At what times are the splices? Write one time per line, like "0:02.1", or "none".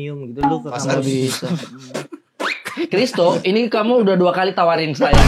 none

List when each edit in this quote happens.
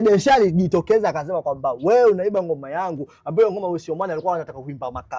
none

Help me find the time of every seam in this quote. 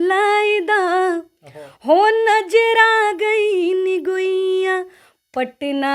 none

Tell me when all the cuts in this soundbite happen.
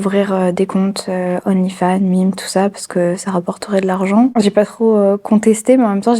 0:04.3

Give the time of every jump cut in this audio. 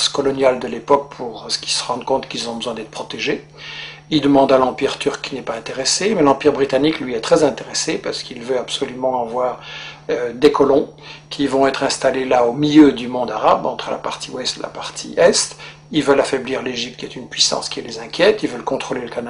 0:16.2

